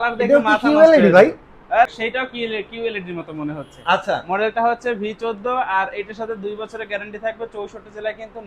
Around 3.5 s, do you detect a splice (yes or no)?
no